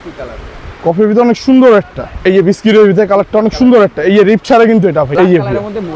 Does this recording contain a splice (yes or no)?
yes